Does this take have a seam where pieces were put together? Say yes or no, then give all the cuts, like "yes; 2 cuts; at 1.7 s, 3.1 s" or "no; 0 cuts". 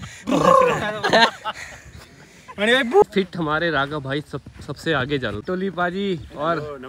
yes; 2 cuts; at 3.0 s, 5.4 s